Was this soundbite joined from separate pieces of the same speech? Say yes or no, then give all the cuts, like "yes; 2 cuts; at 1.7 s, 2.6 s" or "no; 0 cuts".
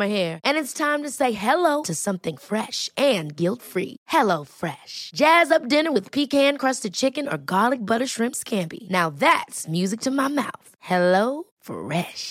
no; 0 cuts